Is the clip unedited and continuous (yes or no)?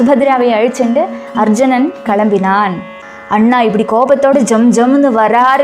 no